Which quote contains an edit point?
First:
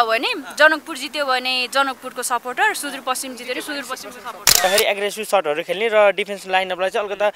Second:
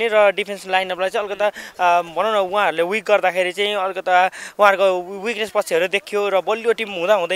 first; 1 cut; at 4.6 s

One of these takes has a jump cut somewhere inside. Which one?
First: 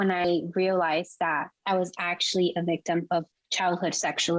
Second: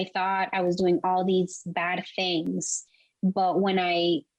first; 2 cuts; at 1.5 s, 3.4 s

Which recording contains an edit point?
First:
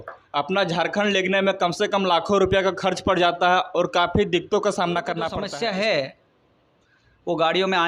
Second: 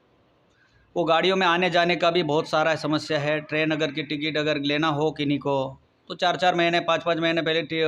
first; 1 cut; at 5.4 s

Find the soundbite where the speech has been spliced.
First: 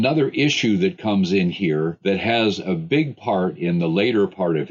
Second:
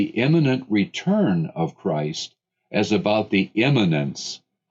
first; 1 cut; at 2.0 s

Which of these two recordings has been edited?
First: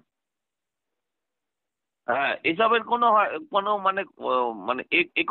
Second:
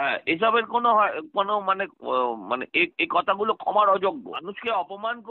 second; 1 cut; at 4.3 s

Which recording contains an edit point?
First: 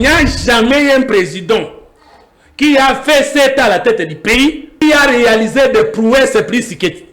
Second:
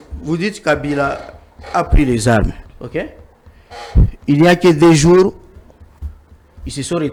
first; 1 cut; at 4.8 s

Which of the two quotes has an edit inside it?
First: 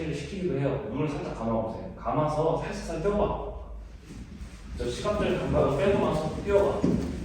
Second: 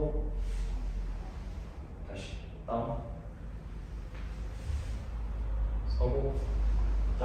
first; 1 cut; at 1.9 s

